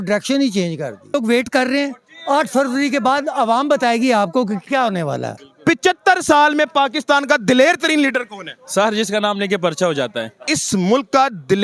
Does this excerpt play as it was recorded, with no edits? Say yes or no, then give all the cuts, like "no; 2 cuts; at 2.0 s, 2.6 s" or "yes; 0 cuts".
no; 3 cuts; at 1.1 s, 5.4 s, 10.4 s